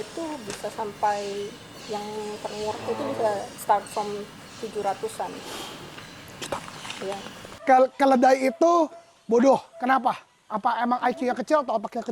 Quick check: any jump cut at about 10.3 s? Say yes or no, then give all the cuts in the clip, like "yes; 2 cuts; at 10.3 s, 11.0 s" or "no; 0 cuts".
no; 1 cut; at 7.5 s